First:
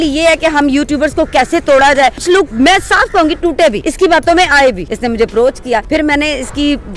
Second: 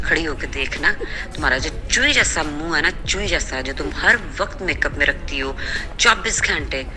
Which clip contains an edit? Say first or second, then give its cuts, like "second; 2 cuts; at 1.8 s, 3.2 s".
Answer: first; 4 cuts; at 2.3 s, 3.8 s, 4.9 s, 5.8 s